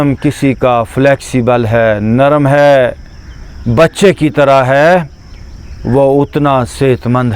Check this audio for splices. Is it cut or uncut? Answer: uncut